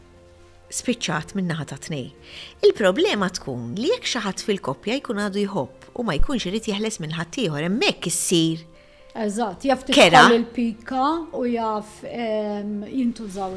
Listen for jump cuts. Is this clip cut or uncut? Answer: uncut